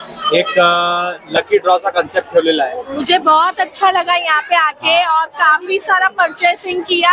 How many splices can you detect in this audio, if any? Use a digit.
1